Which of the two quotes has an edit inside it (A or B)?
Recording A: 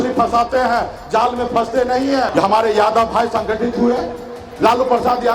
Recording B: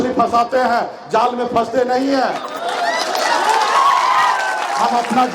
A